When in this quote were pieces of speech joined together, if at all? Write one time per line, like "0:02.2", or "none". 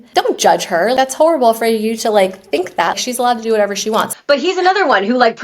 0:04.1

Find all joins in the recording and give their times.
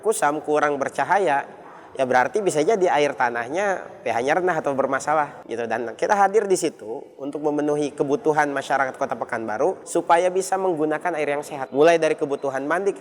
0:05.4
0:09.8
0:11.6

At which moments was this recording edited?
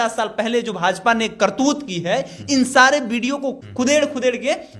0:03.6

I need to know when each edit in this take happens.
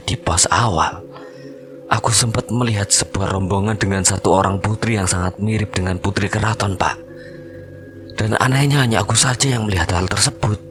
none

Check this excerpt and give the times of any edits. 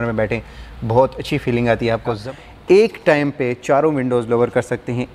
0:02.2

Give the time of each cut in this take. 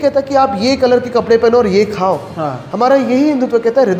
none

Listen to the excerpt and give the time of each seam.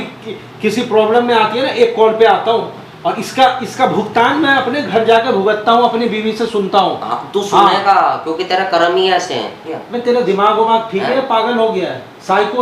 0:09.8

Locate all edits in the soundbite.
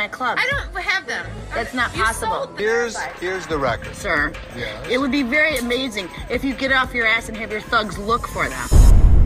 0:02.5

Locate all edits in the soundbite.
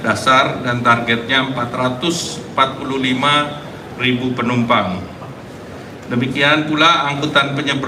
none

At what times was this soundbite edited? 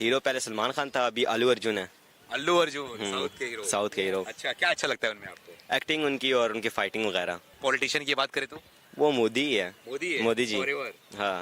0:02.6
0:07.5

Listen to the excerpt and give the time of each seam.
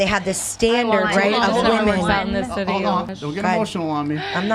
0:03.1

